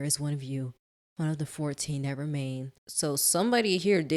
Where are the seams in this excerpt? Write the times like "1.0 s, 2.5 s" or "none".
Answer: 2.8 s